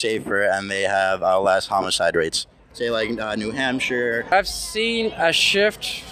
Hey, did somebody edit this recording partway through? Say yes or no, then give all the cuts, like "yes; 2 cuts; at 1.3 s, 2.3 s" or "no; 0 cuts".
yes; 1 cut; at 4.3 s